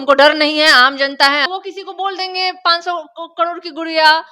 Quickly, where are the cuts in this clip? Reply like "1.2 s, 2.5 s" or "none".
1.5 s